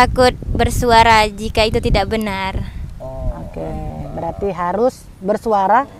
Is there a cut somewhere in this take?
no; 0 cuts

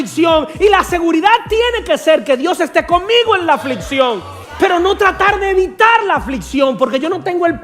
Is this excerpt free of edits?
no; 1 cut; at 4.4 s

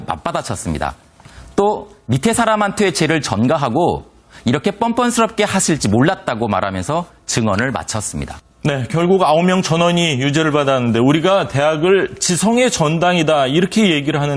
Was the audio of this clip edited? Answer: no; 0 cuts

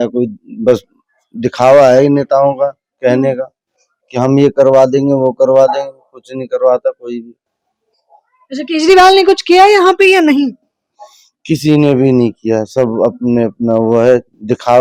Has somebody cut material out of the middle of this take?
no; 0 cuts

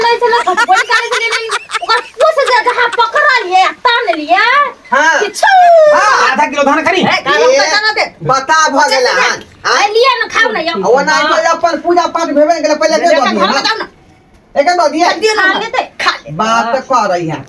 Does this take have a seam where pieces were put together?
yes; 1 cut; at 5.9 s

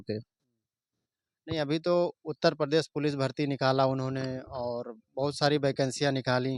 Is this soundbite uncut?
yes; 0 cuts

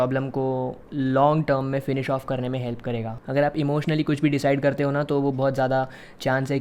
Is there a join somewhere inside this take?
yes; 1 cut; at 3.2 s

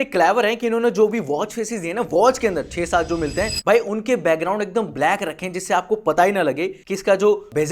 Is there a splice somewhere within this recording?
no; 0 cuts

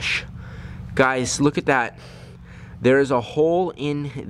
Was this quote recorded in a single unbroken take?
yes; 0 cuts

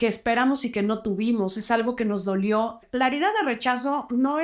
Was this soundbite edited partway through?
yes; 1 cut; at 2.8 s

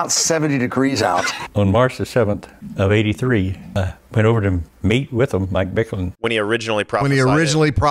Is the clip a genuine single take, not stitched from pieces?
no; 2 cuts; at 1.4 s, 6.1 s

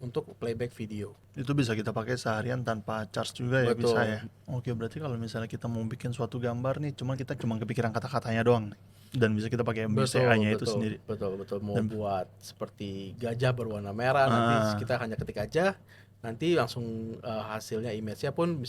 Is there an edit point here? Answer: yes; 2 cuts; at 1.2 s, 4.3 s

